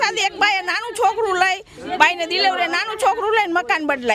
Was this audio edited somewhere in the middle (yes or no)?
no